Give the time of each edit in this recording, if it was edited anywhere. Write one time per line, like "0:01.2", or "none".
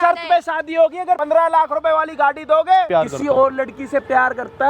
0:01.2
0:02.9